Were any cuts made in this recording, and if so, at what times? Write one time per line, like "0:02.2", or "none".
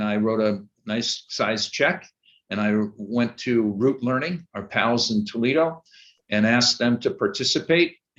none